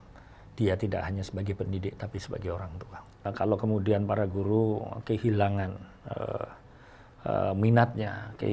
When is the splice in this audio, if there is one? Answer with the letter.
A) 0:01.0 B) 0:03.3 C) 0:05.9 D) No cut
B